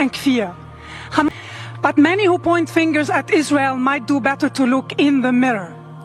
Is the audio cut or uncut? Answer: cut